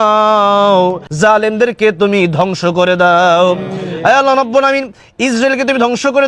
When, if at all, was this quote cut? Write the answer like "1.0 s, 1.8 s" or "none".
1.0 s

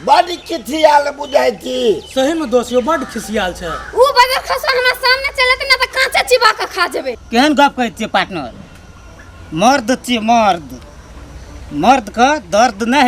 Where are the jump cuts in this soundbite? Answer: 7.2 s

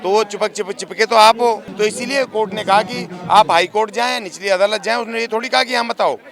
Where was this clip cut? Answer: 1.7 s

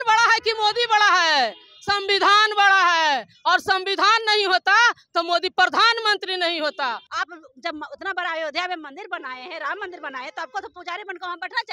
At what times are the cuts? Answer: 7.1 s

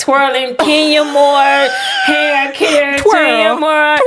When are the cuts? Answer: none

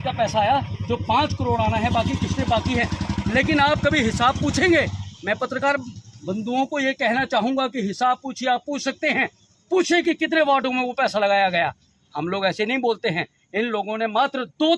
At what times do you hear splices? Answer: none

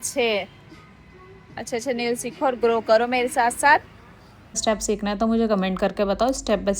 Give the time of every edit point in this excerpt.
4.6 s

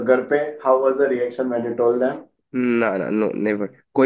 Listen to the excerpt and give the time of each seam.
2.3 s

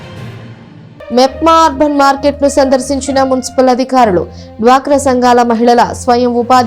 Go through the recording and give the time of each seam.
1.1 s

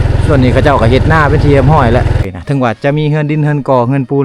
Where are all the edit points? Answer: 2.2 s

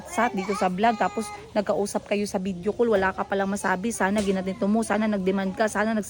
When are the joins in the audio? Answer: none

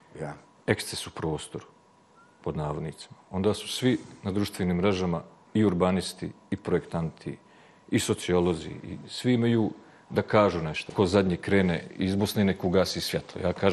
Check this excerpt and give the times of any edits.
10.9 s

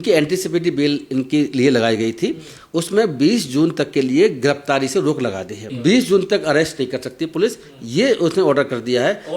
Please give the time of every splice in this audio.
5.6 s

